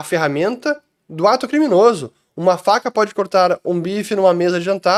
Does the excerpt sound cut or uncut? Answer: uncut